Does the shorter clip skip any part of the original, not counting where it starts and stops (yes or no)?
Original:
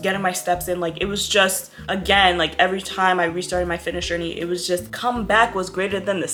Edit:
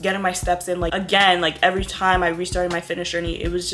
yes